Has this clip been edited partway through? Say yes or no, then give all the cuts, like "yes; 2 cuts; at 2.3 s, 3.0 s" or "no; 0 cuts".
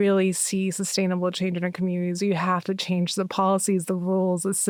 no; 0 cuts